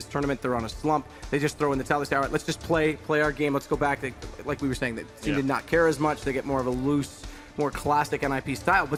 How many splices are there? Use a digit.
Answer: 0